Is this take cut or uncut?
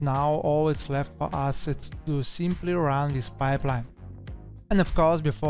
uncut